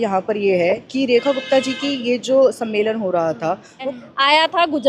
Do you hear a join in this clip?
yes; 1 cut; at 3.8 s

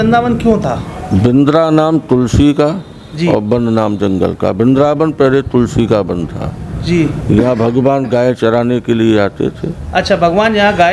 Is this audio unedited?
yes; 0 cuts

